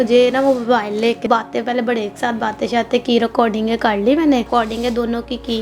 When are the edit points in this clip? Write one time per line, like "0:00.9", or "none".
0:01.3
0:04.5